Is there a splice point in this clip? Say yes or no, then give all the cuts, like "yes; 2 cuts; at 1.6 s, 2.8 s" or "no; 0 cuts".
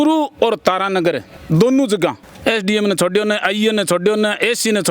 yes; 2 cuts; at 1.3 s, 2.3 s